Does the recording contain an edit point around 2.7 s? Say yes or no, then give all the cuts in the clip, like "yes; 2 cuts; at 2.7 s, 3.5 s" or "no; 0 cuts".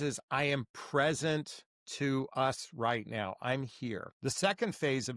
no; 1 cut; at 4.1 s